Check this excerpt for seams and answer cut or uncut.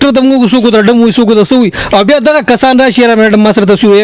uncut